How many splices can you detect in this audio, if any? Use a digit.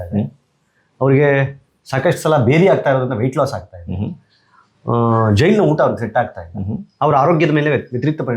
0